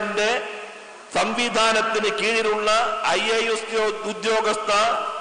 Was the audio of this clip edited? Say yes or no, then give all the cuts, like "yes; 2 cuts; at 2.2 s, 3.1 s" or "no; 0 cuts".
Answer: no; 0 cuts